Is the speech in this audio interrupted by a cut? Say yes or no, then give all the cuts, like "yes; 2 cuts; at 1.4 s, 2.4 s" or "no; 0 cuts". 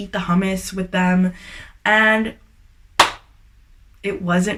no; 0 cuts